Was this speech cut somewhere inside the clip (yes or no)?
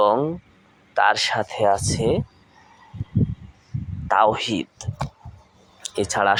no